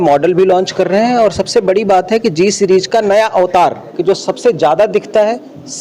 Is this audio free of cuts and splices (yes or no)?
no